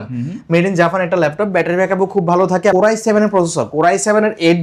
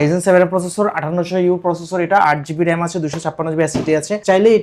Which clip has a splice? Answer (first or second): first